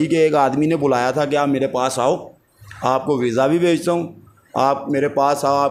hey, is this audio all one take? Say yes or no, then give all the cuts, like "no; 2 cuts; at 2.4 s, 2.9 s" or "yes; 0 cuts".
yes; 0 cuts